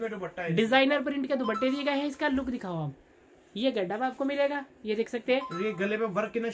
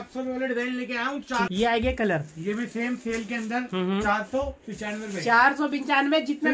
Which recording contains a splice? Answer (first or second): second